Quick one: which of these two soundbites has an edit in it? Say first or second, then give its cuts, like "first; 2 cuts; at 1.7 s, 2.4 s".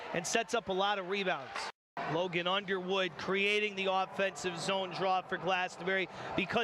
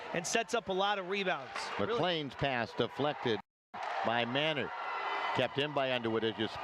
first; 1 cut; at 1.8 s